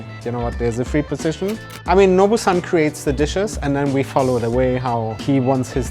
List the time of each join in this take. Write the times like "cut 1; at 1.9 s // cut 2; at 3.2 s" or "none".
cut 1; at 1.6 s